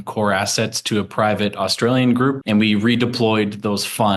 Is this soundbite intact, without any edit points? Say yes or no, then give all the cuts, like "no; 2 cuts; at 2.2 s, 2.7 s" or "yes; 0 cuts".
no; 1 cut; at 2.4 s